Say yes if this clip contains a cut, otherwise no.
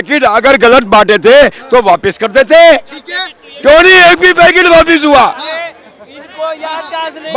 no